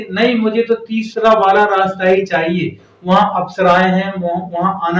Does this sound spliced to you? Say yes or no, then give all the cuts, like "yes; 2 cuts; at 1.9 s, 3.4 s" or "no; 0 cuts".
no; 0 cuts